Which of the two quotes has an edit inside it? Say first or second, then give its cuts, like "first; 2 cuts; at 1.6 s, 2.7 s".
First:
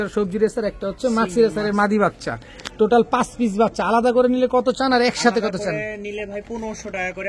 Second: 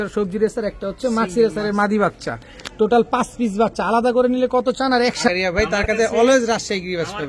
second; 1 cut; at 5.3 s